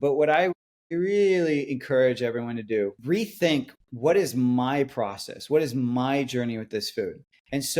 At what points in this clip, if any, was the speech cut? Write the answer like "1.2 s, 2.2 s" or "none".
3.0 s